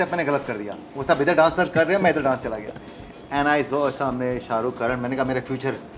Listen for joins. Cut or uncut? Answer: uncut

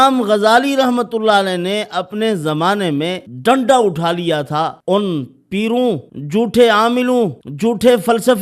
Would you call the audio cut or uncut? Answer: cut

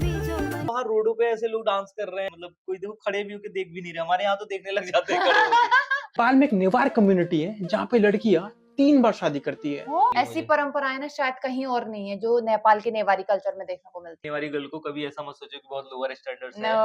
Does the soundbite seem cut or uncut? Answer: cut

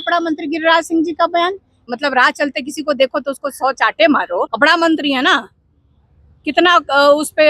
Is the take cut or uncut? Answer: cut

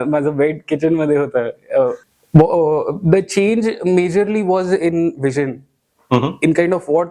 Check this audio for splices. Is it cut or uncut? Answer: cut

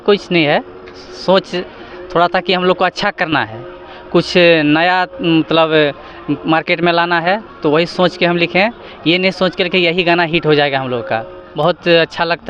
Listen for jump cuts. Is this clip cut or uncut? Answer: cut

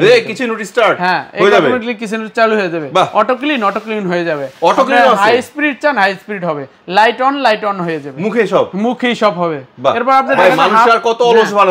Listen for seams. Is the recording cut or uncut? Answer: uncut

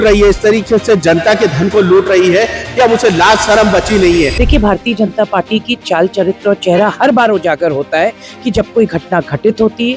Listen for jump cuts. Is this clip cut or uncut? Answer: cut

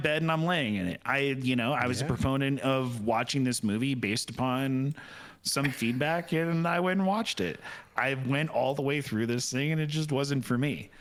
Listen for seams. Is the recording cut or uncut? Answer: uncut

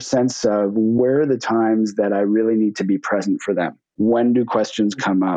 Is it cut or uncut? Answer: cut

